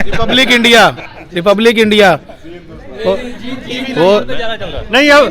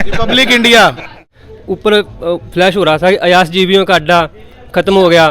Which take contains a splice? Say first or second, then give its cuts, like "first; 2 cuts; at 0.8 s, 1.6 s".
second; 1 cut; at 1.3 s